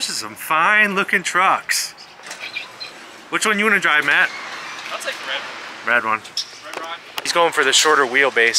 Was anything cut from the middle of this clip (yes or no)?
yes